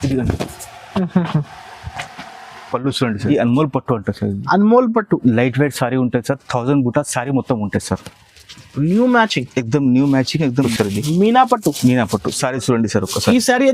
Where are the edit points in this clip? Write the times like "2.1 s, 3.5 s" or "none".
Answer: 3.3 s, 10.6 s